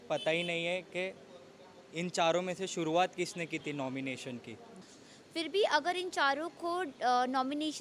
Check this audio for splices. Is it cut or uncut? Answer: cut